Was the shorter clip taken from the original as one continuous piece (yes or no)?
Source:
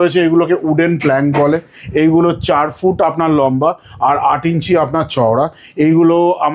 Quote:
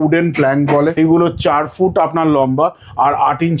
no